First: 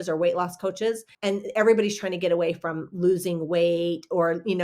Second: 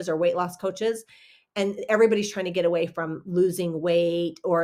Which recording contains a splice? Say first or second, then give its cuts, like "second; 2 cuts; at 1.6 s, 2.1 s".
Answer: first; 1 cut; at 1.1 s